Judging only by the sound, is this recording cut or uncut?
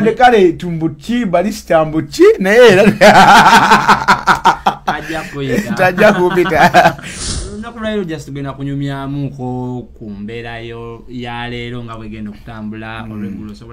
cut